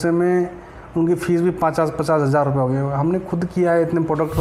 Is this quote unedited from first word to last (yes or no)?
yes